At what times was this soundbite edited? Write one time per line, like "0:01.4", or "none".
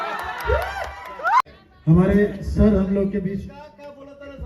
0:01.4